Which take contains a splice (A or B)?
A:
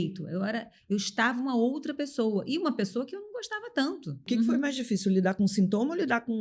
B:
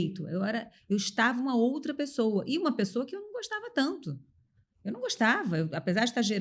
A